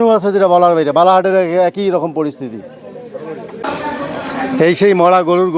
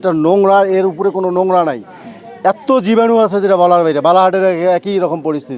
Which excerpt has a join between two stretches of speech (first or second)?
first